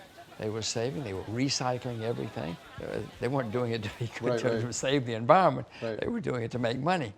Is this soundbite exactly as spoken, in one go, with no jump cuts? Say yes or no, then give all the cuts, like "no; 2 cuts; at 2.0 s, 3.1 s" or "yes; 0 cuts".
no; 1 cut; at 2.7 s